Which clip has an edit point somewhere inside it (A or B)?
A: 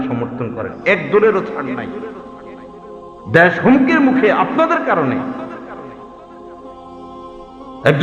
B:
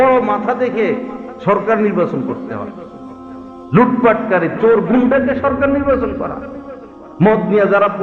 A